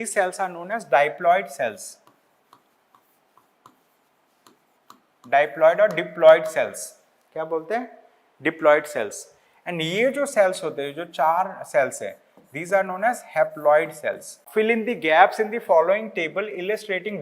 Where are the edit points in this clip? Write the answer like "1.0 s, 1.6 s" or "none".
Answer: 14.4 s

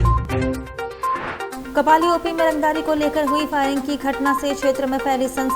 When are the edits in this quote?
1.6 s

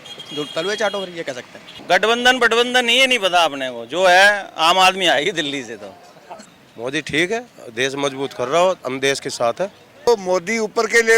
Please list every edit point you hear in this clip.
1.8 s, 6.3 s, 10.1 s

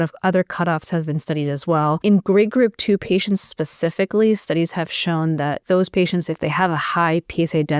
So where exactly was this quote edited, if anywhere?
2.0 s, 5.6 s

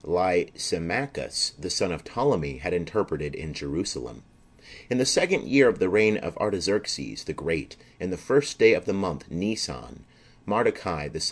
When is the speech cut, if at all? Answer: 5.2 s

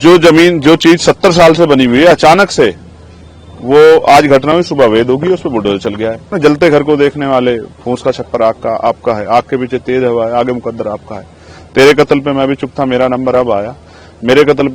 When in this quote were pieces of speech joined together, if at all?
6.3 s

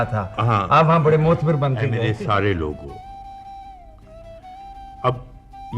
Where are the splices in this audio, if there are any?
1.9 s

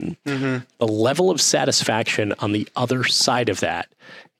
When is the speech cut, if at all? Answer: none

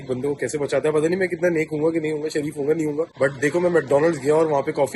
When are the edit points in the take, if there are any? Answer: none

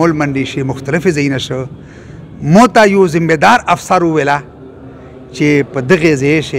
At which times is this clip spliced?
none

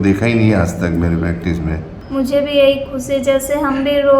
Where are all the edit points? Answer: 1.9 s

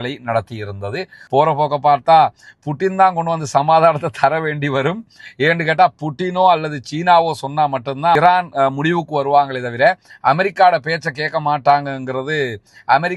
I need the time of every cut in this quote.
1.2 s

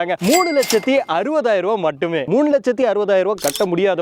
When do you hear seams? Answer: 2.3 s

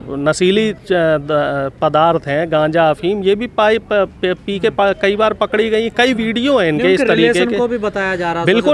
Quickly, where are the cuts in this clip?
none

